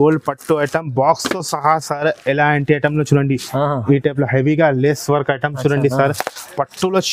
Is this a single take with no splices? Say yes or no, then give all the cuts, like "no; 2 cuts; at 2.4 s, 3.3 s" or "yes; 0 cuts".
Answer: yes; 0 cuts